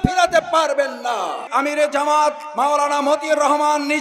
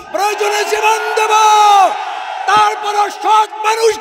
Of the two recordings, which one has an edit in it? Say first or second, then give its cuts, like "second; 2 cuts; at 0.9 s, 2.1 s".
first; 1 cut; at 1.4 s